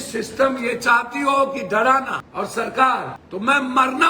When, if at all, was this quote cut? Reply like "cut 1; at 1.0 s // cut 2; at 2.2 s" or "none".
cut 1; at 2.2 s // cut 2; at 3.2 s